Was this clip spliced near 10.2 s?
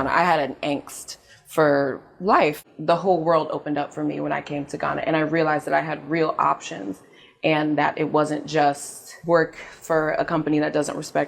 no; 1 cut; at 2.6 s

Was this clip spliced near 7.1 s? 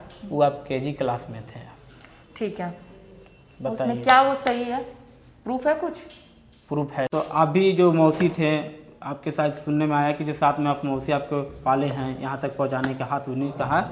yes; 1 cut; at 7.1 s

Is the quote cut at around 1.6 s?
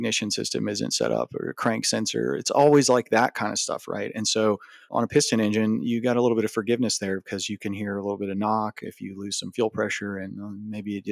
no; 0 cuts

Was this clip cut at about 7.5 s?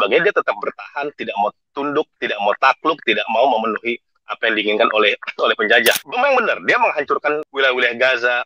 yes; 3 cuts; at 2.2 s, 6.0 s, 7.5 s

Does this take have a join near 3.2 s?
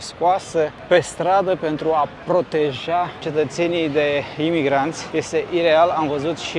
yes; 2 cuts; at 3.2 s, 5.0 s

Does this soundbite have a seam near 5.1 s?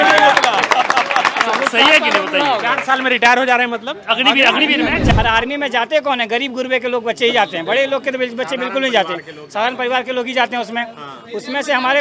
yes; 1 cut; at 5.1 s

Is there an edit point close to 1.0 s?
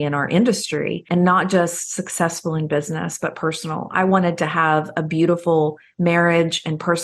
yes; 1 cut; at 1.0 s

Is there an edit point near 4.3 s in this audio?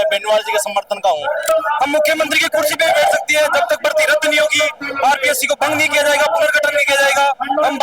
no; 1 cut; at 1.4 s

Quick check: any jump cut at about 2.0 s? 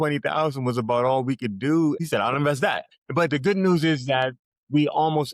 yes; 2 cuts; at 2.0 s, 2.9 s

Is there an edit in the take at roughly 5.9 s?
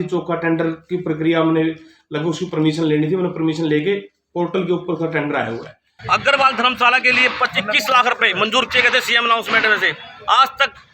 yes; 1 cut; at 5.9 s

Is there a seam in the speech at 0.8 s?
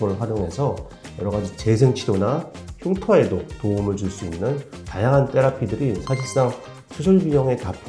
no; 0 cuts

